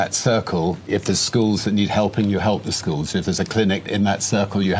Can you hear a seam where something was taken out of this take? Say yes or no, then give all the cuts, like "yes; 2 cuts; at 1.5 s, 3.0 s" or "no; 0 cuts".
yes; 2 cuts; at 0.8 s, 3.9 s